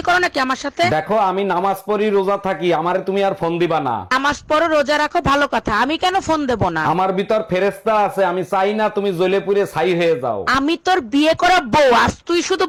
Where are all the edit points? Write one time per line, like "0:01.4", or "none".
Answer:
none